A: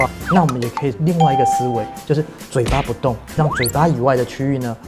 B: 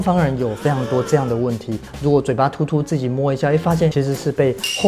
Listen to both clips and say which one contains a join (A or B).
B